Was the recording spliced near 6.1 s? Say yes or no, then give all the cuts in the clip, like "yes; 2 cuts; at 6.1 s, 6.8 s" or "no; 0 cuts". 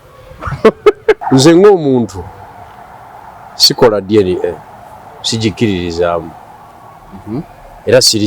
no; 1 cut; at 1.2 s